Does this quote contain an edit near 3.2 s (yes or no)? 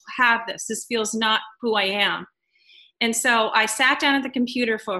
no